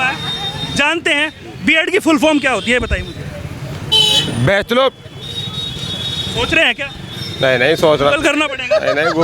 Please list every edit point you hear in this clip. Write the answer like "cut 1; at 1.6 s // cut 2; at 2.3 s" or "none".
none